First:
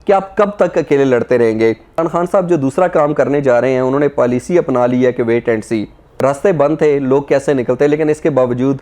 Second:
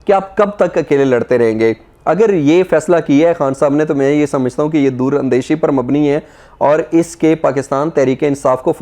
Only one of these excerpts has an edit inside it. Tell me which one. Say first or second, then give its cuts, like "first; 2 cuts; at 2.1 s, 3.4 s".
first; 2 cuts; at 2.0 s, 6.1 s